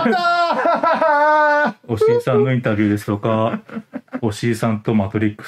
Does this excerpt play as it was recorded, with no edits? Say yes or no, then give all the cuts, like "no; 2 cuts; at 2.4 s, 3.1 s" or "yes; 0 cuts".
yes; 0 cuts